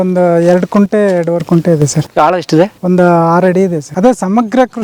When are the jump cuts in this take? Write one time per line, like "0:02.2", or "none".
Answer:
0:02.0
0:02.8
0:03.9